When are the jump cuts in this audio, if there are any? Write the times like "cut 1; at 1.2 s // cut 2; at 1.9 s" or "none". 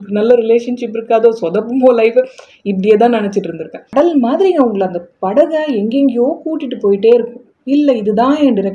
cut 1; at 3.8 s